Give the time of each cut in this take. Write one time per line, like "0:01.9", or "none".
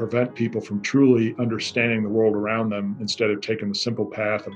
none